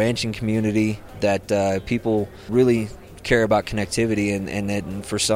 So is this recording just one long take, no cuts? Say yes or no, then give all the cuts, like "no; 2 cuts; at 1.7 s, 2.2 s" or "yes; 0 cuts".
no; 2 cuts; at 1.1 s, 2.5 s